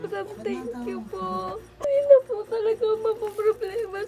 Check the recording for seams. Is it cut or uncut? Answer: cut